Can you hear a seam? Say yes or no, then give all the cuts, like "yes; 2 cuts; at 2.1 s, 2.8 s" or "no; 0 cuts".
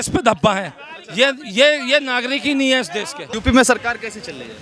yes; 1 cut; at 3.3 s